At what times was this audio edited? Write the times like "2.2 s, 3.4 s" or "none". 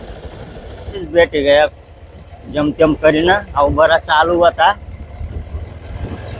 1.1 s